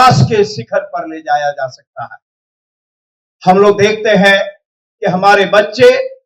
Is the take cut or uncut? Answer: uncut